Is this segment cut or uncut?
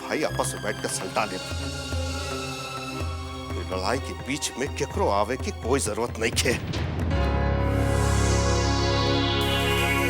uncut